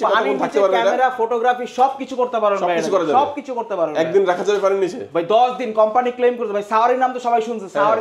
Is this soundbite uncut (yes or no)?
yes